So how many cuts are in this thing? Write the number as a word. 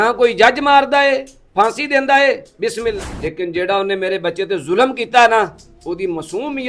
one